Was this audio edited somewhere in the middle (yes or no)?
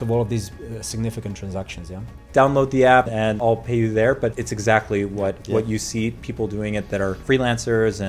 yes